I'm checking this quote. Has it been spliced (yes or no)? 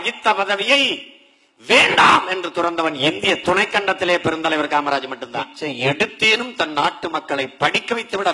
yes